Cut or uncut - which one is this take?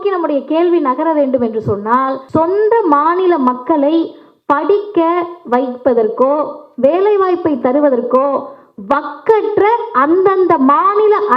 cut